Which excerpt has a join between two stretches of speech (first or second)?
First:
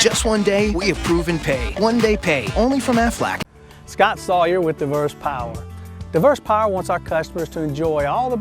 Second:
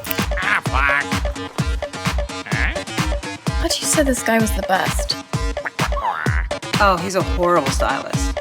first